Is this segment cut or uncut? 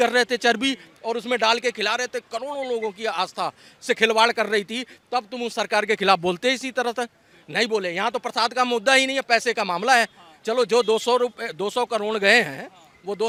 uncut